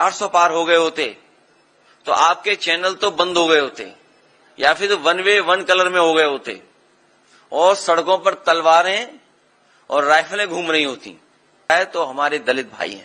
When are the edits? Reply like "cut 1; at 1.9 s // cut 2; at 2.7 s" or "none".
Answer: cut 1; at 11.7 s